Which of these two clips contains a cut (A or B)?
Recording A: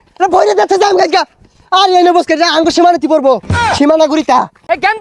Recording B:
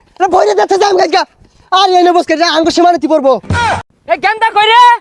B